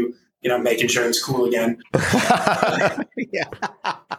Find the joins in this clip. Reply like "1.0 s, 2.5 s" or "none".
1.8 s